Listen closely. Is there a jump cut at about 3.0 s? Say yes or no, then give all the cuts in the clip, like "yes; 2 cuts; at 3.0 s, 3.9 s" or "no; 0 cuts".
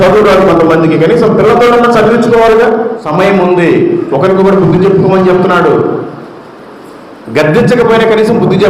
yes; 1 cut; at 3.0 s